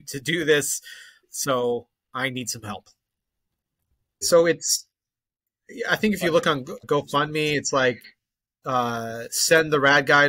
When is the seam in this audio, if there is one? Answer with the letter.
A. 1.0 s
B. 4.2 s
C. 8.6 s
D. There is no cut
B